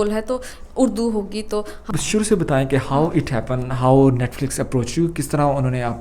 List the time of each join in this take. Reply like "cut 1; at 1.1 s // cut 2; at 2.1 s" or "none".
cut 1; at 1.9 s